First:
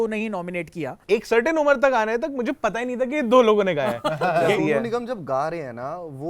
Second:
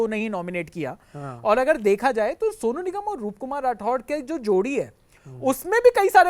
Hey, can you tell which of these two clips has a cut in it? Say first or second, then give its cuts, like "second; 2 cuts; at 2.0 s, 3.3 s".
first; 2 cuts; at 1.0 s, 4.5 s